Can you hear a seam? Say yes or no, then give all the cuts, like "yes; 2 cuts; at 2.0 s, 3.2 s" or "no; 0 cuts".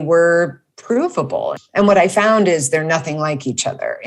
yes; 1 cut; at 1.6 s